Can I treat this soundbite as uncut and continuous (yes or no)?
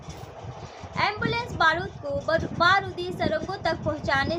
yes